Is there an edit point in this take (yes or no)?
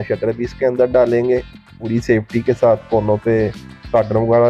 yes